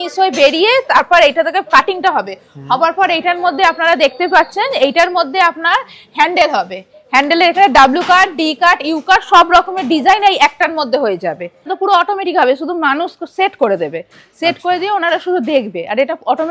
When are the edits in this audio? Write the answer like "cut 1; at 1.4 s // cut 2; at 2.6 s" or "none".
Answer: cut 1; at 11.7 s